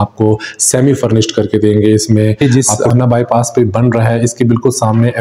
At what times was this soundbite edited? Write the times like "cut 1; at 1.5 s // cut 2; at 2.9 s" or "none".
cut 1; at 2.4 s